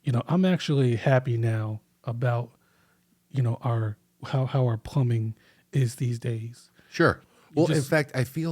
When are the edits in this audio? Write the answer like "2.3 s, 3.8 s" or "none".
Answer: 7.2 s